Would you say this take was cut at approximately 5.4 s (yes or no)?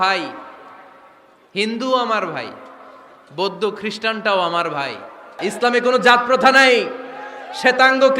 yes